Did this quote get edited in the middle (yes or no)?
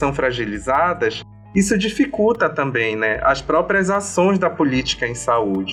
no